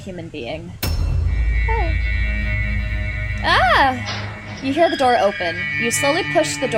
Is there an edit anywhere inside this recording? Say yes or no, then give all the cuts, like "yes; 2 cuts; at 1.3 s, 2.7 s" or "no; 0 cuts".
no; 0 cuts